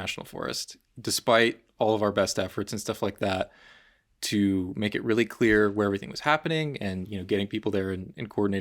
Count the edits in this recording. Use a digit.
1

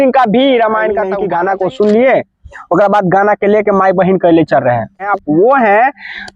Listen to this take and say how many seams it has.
2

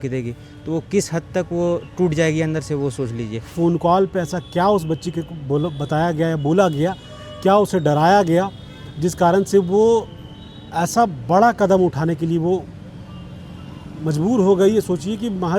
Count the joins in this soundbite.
1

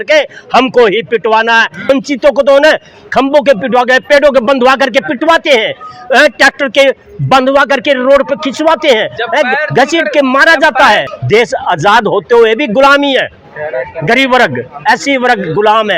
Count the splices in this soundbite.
2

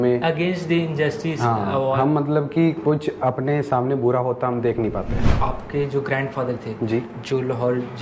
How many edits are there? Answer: 1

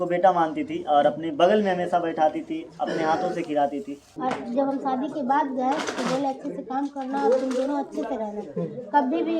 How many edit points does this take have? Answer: 1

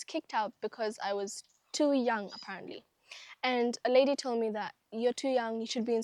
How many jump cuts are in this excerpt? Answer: 0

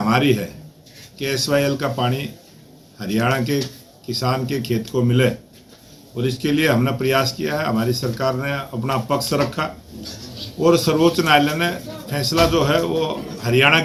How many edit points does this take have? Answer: 0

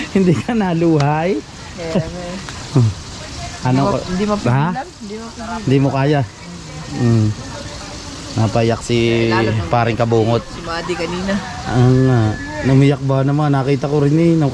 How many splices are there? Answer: 0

